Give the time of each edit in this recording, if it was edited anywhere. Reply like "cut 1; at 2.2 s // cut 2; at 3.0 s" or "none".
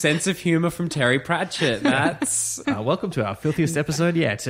cut 1; at 2.6 s